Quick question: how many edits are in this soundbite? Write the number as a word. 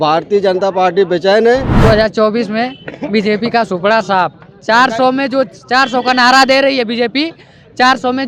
one